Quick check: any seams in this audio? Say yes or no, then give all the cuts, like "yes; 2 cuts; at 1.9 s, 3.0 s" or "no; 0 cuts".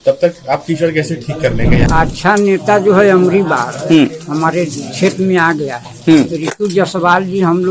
yes; 1 cut; at 1.8 s